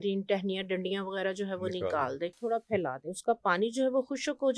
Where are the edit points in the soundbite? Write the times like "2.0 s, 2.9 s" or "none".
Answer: 2.4 s